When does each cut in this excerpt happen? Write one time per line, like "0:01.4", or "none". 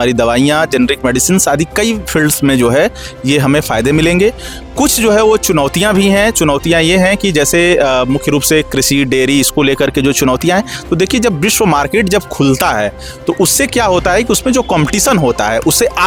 none